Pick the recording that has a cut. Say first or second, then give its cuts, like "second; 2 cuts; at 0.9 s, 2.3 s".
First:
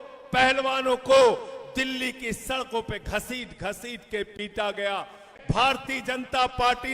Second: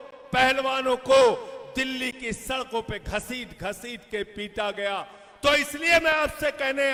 first; 1 cut; at 5.2 s